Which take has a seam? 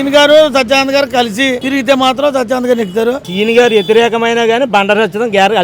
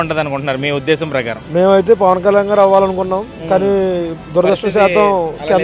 first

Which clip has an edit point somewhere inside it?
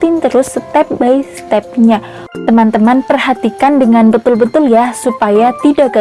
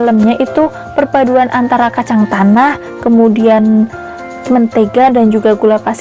first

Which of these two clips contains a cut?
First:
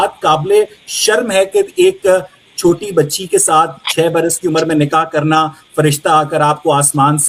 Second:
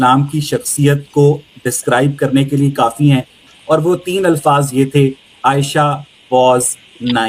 second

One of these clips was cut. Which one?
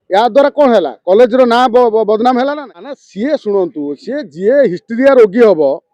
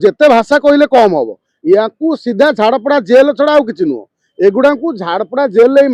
first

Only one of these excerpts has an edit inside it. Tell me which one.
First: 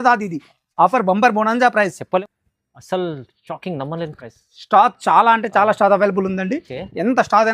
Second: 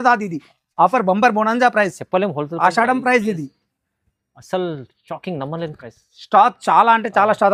first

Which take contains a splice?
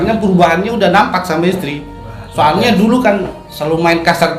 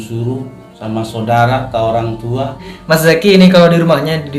second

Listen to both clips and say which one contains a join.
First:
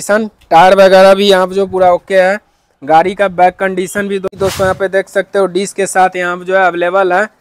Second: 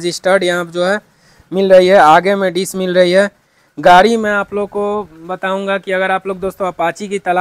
first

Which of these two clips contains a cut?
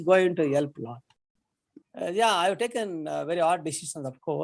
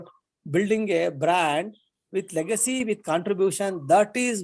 first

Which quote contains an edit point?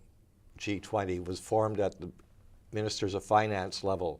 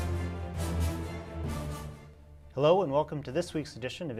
first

